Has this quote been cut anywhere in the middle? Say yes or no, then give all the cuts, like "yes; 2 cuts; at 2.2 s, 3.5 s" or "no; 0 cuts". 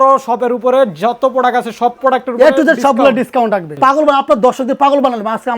yes; 1 cut; at 3.8 s